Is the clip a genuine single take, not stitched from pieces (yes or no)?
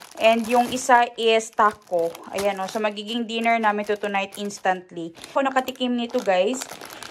no